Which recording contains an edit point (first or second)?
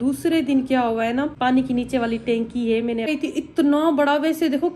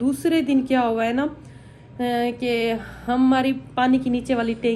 first